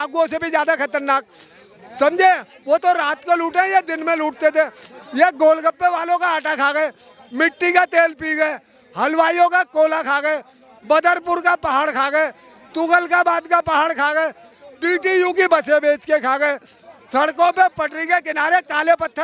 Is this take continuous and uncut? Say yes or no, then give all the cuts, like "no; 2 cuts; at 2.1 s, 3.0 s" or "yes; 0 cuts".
yes; 0 cuts